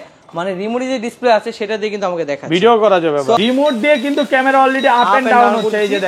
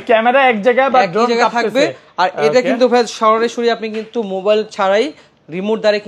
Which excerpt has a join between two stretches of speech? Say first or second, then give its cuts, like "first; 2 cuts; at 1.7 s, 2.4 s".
first; 1 cut; at 3.4 s